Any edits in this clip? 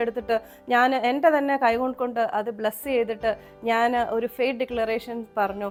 no; 0 cuts

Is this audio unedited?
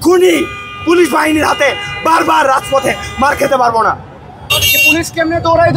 no; 1 cut; at 4.5 s

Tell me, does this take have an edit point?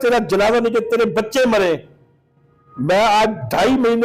no; 0 cuts

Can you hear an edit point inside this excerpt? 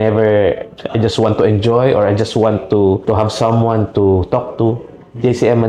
no; 0 cuts

